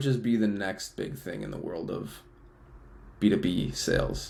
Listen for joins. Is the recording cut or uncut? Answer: uncut